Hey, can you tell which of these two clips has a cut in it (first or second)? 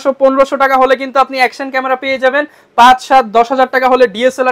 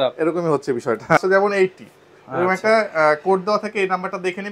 second